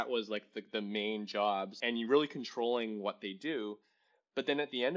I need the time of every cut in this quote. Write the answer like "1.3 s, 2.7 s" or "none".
1.8 s